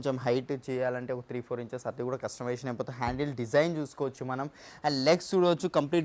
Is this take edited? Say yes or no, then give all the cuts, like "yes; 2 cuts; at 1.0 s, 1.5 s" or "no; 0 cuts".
no; 0 cuts